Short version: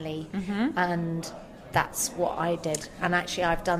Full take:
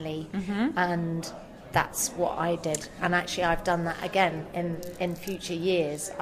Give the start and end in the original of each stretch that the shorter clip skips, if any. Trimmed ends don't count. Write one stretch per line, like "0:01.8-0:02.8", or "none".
none

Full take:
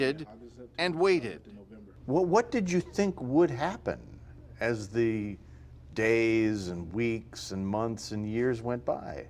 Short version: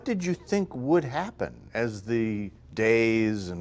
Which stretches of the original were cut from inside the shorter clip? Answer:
0:04.1-0:04.5
0:05.4-0:05.8

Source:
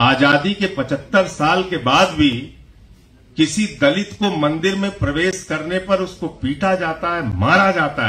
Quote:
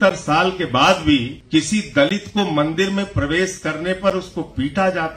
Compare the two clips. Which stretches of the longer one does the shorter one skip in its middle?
0:02.5-0:03.2

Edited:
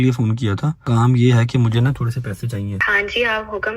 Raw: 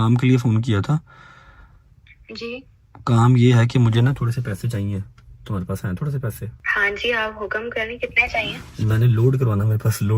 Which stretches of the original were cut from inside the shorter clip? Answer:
0:01.1-0:03.0
0:05.0-0:06.7

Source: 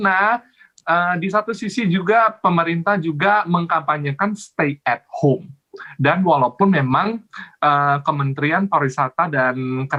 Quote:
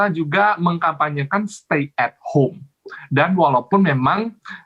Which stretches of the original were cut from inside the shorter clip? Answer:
none

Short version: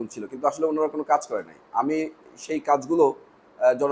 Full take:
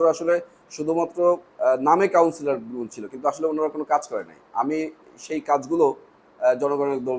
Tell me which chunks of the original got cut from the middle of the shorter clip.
none

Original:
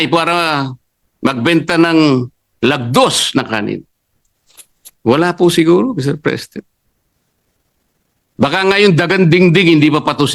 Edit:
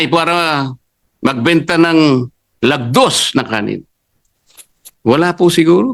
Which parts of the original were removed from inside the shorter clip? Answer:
none

